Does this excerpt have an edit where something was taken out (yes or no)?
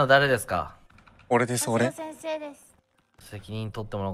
no